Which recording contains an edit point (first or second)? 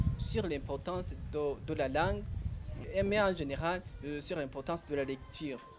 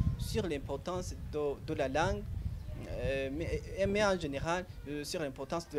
first